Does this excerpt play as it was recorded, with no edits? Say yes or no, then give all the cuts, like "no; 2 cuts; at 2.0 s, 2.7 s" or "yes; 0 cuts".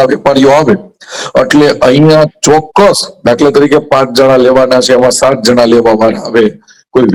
yes; 0 cuts